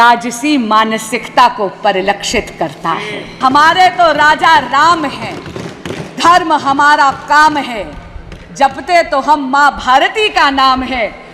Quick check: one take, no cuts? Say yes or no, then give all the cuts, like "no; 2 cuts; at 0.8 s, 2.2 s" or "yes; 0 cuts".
no; 1 cut; at 3.2 s